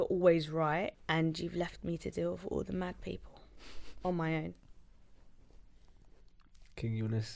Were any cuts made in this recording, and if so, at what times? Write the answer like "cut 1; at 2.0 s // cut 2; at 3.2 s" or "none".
cut 1; at 1.0 s